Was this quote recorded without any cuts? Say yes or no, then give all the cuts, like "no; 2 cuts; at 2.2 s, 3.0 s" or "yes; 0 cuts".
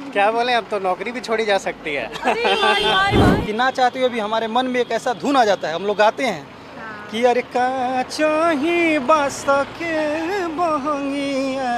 no; 1 cut; at 3.2 s